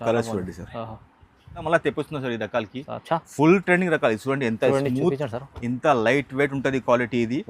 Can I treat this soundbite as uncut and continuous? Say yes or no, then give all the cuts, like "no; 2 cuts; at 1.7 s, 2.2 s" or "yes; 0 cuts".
no; 1 cut; at 1.6 s